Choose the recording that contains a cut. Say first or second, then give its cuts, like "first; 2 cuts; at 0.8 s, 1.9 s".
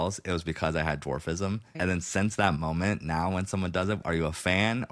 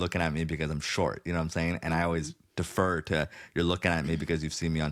first; 2 cuts; at 1.7 s, 4.0 s